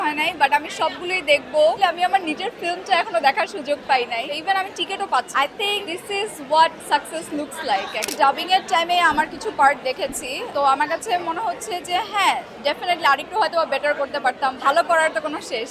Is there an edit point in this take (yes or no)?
yes